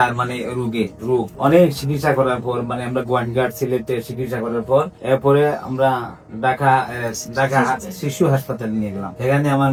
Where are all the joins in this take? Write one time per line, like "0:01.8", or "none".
none